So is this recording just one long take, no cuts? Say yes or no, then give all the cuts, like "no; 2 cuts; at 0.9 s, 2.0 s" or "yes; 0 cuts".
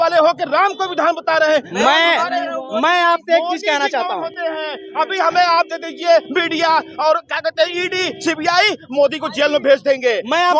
yes; 0 cuts